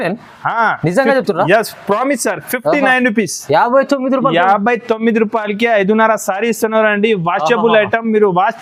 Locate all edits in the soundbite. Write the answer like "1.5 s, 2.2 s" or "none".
none